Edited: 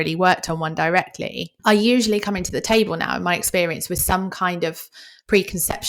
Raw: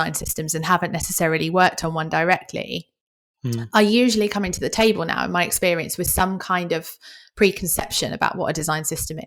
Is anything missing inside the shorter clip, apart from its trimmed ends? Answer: yes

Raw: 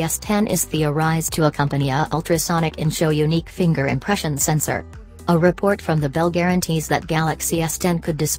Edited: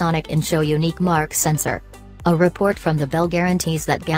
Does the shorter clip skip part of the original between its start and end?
yes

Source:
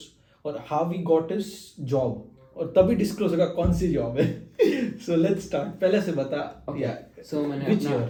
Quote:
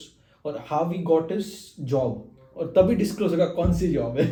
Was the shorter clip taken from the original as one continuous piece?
yes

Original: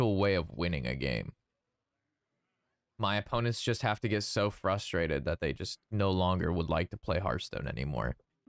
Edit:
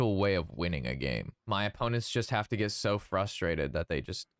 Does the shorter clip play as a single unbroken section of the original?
no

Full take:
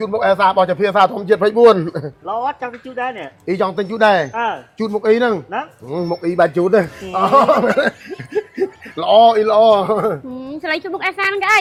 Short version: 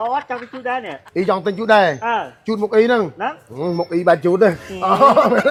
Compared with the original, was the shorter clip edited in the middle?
no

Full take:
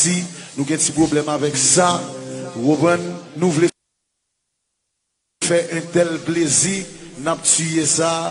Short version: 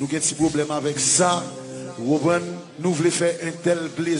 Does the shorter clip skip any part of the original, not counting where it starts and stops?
yes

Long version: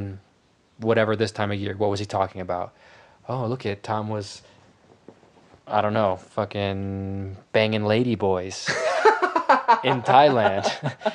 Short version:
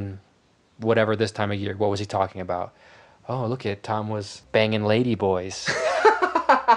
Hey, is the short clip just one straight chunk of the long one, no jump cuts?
no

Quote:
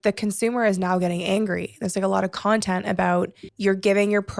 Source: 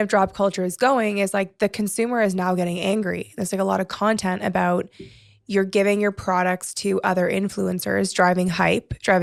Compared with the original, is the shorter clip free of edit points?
no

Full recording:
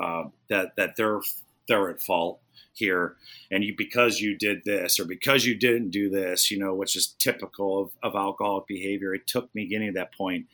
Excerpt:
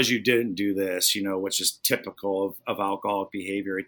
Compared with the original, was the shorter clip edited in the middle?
no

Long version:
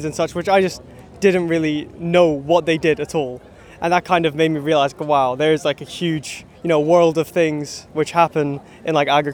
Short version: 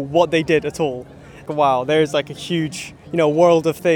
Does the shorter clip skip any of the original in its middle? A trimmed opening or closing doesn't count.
yes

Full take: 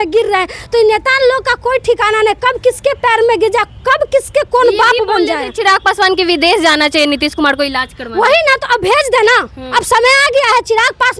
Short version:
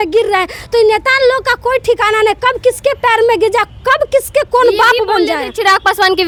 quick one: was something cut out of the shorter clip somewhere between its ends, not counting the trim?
no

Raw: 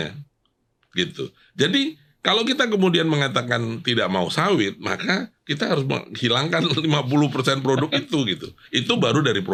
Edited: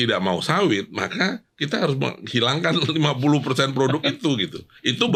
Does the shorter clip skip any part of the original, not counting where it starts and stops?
no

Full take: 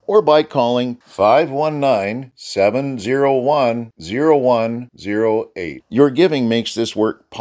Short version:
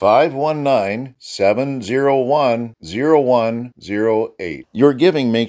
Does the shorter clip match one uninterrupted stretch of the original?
yes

